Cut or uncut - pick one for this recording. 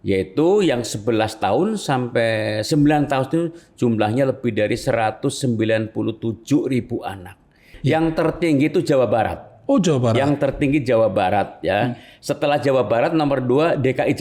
cut